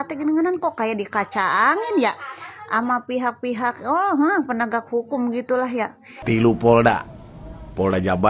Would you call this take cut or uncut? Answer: cut